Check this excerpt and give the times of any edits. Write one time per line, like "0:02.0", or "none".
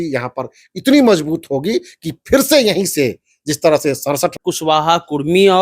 0:04.4